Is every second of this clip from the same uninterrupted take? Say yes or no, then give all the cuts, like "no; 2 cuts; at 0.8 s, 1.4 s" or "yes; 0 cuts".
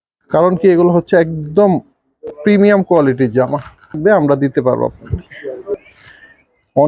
no; 3 cuts; at 4.0 s, 5.0 s, 5.8 s